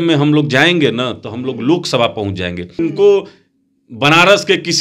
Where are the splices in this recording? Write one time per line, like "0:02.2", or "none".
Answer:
0:02.8